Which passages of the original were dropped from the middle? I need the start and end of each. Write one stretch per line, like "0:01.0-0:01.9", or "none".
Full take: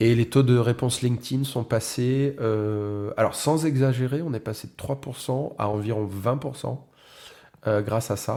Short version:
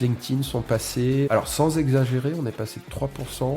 0:02.3-0:03.2